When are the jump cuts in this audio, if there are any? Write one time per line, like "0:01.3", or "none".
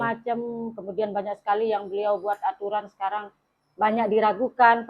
none